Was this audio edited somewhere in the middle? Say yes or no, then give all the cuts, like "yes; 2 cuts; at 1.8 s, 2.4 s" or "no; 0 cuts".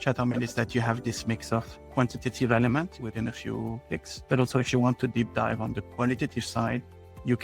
no; 0 cuts